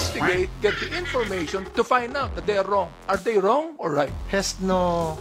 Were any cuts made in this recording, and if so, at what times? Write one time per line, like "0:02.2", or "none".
0:03.0
0:04.2